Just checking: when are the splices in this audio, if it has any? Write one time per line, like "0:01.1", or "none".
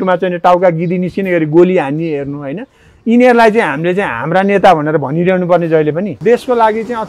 0:06.1